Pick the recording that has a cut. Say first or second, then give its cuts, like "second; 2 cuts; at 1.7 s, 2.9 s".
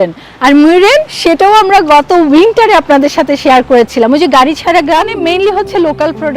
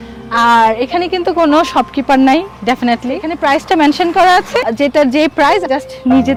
first; 1 cut; at 5.1 s